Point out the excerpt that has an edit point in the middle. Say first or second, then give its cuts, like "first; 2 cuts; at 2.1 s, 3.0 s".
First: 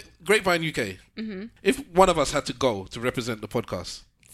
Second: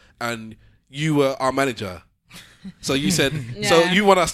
first; 1 cut; at 1.5 s